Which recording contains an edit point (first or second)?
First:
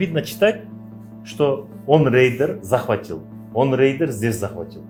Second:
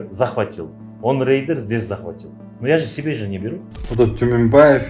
second